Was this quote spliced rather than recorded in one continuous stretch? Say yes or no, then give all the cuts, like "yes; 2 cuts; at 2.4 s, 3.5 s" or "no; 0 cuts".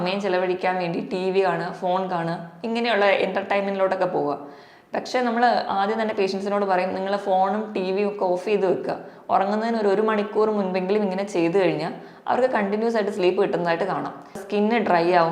yes; 1 cut; at 14.4 s